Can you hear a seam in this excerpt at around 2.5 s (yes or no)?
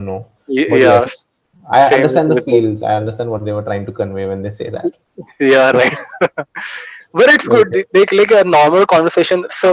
no